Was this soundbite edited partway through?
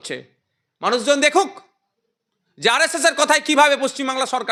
no; 0 cuts

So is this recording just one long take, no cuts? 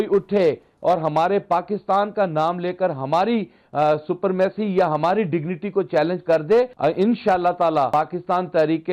no; 2 cuts; at 6.7 s, 7.9 s

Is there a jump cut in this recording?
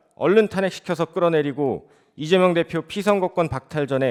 no; 0 cuts

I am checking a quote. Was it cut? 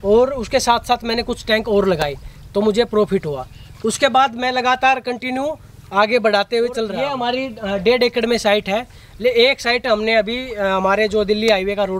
yes; 1 cut; at 7.0 s

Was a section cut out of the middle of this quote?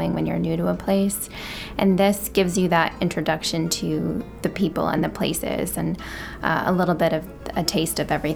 no; 0 cuts

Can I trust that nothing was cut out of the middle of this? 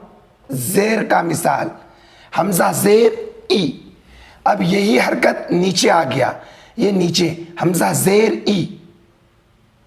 yes; 0 cuts

